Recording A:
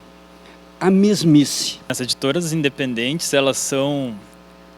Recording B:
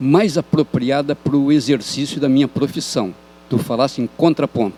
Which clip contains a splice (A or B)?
A